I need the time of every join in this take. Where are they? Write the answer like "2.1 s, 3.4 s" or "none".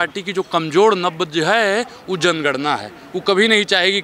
none